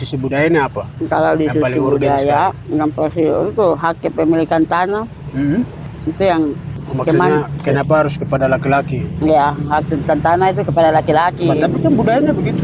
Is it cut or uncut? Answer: cut